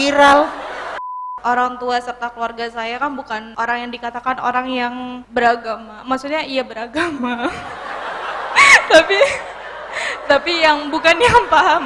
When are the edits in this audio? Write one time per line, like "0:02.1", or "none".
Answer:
0:01.3
0:03.5
0:05.1